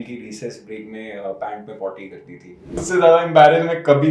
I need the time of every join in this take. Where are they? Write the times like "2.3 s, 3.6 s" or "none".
2.8 s